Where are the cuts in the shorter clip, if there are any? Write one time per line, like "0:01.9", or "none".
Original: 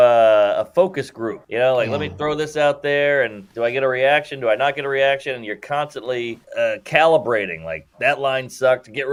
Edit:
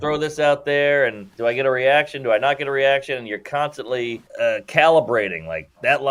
none